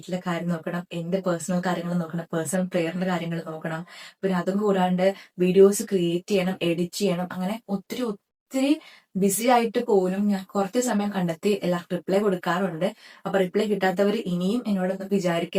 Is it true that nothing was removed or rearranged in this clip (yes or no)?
yes